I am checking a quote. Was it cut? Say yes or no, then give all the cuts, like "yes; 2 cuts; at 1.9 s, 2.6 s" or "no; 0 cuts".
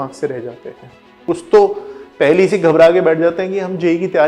yes; 1 cut; at 1.1 s